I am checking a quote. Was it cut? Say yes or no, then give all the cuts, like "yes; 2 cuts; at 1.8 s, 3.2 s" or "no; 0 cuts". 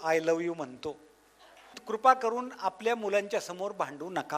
yes; 1 cut; at 1.8 s